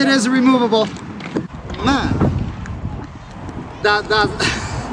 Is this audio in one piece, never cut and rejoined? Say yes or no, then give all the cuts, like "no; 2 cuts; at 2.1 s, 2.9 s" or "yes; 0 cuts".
no; 1 cut; at 1.6 s